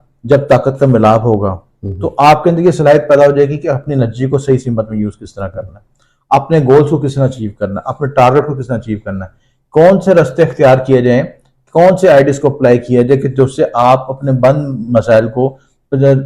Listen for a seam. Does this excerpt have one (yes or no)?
no